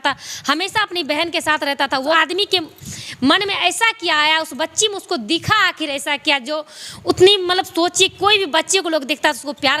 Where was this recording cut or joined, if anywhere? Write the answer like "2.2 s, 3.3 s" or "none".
2.2 s